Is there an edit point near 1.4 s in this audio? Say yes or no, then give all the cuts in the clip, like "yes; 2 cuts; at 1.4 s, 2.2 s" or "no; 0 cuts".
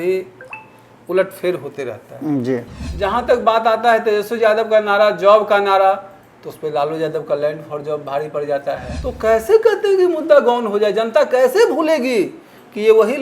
no; 2 cuts; at 2.8 s, 8.9 s